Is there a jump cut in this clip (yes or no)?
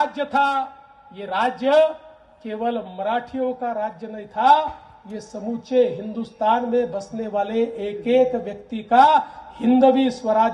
no